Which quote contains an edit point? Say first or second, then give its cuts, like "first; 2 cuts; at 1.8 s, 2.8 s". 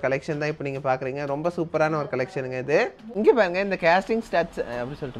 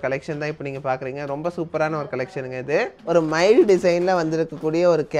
second; 1 cut; at 3.0 s